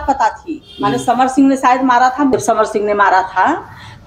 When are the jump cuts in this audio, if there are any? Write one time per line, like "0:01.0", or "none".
0:02.3